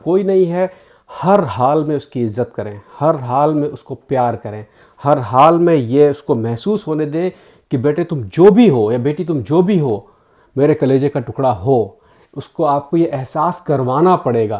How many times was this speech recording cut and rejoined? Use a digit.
0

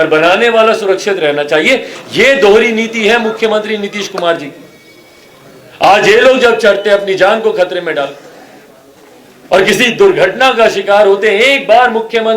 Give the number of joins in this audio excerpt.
0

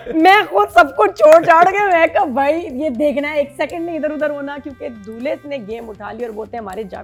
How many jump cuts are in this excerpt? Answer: 0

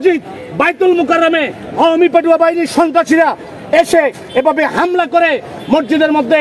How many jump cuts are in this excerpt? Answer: 0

